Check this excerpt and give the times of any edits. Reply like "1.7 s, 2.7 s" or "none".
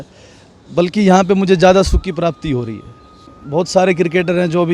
3.3 s